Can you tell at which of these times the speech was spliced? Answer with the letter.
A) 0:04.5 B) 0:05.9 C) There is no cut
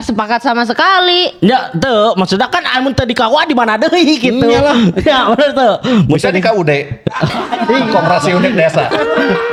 C